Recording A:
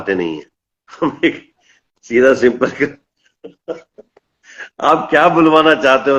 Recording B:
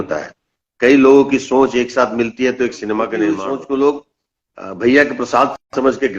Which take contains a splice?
B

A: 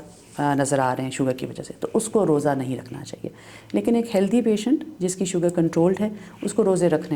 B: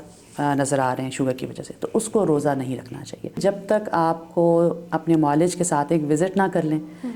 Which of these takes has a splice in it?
B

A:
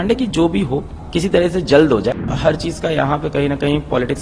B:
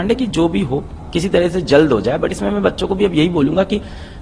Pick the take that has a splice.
A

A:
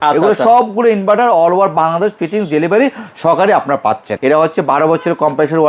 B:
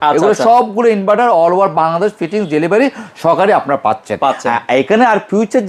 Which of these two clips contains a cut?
A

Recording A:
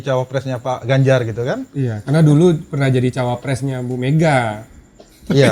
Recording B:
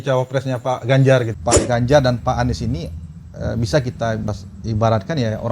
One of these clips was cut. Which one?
B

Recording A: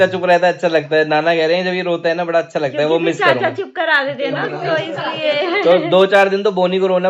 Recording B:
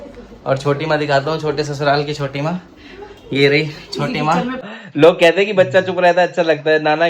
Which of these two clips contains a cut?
B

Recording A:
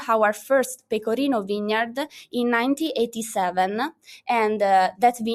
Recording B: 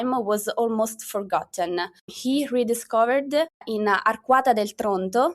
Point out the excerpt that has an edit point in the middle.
B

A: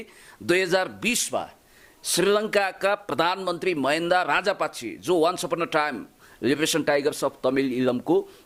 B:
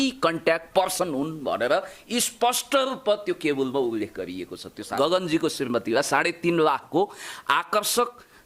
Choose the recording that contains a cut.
B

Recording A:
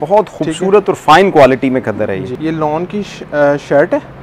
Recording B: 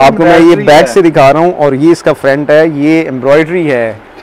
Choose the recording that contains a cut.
A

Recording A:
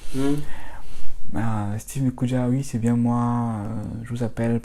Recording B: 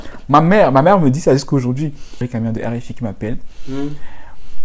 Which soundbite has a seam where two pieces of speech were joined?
B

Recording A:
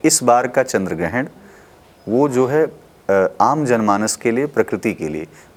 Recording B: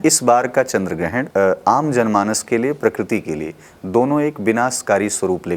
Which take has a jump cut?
B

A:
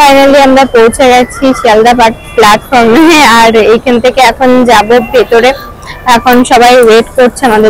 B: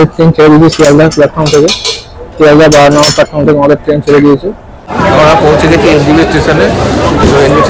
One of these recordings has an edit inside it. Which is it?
B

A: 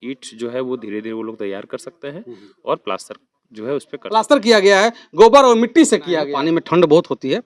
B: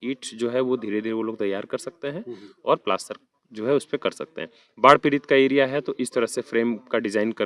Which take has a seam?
A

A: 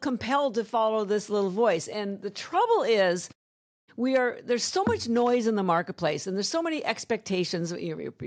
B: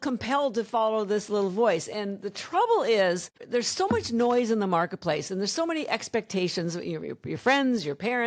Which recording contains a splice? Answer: B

